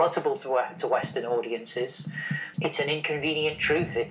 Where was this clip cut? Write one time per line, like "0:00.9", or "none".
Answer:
0:02.5